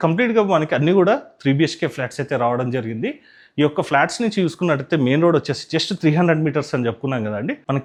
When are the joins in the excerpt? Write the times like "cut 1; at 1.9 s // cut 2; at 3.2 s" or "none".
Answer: none